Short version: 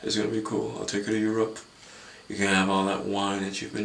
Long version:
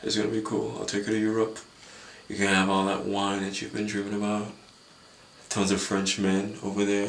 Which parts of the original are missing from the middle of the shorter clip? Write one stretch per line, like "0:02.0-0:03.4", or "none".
none